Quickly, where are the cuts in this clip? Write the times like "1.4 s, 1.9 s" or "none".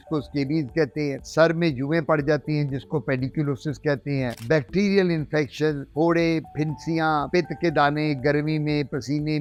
none